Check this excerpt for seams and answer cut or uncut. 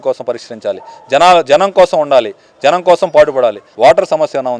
cut